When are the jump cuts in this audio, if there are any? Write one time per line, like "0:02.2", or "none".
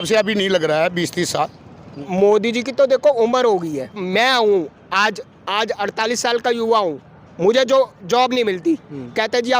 0:01.9
0:04.0

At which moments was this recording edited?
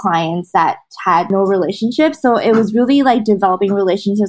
0:01.3

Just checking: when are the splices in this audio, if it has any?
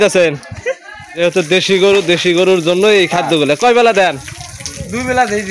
0:01.2

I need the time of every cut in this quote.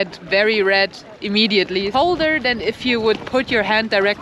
0:01.9

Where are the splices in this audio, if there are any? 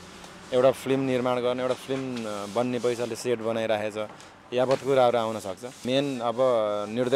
0:05.8

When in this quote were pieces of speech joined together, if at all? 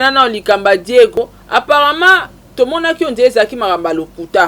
0:01.2

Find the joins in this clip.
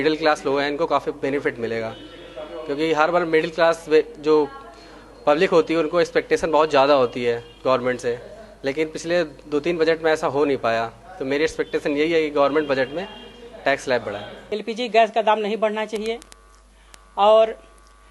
0:14.3

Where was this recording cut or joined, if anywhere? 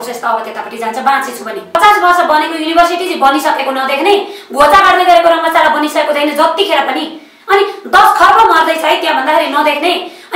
0:01.8

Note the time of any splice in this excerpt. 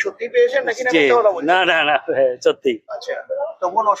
none

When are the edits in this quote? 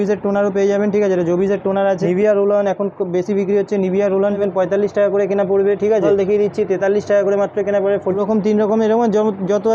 0:02.0
0:04.4
0:06.1
0:08.2

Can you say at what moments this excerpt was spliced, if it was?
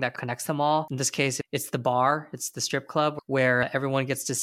0:01.0

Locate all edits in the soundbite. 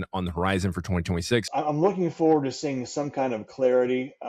0:01.5

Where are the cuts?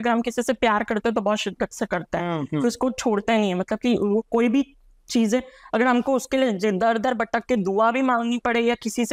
none

